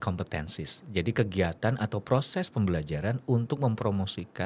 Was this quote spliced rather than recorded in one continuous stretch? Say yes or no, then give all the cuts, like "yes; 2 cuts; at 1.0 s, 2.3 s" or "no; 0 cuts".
no; 0 cuts